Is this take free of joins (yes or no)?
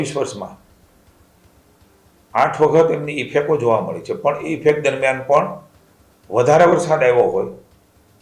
yes